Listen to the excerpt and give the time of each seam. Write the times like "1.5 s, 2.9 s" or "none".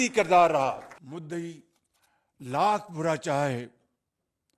0.9 s